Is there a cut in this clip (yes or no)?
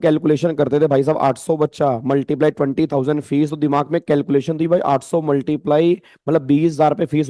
no